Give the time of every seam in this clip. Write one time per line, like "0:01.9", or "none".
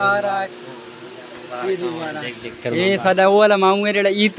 none